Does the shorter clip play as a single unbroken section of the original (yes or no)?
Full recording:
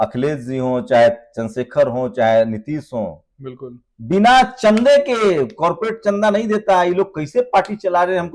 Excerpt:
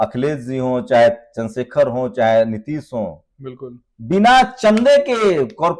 yes